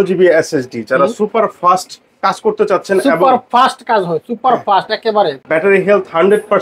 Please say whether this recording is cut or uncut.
cut